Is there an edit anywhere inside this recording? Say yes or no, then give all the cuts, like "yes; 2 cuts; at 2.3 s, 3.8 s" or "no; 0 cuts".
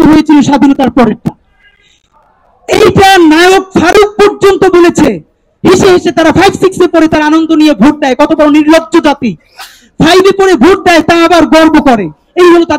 no; 0 cuts